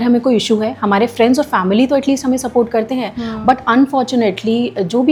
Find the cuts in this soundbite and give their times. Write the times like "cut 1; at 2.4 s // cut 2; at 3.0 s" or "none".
none